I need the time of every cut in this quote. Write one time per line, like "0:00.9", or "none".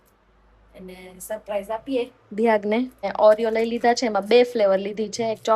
0:03.1